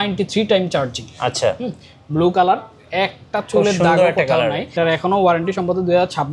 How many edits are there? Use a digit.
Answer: 1